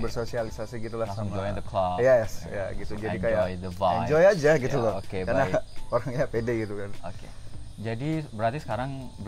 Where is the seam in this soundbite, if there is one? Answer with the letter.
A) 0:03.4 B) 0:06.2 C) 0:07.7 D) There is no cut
D